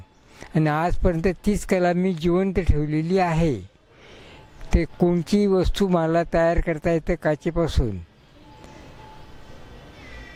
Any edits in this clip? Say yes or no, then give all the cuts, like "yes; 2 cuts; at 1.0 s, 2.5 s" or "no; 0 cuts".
no; 0 cuts